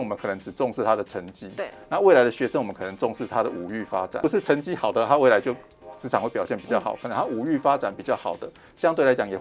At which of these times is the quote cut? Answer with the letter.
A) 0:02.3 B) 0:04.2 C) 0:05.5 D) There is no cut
B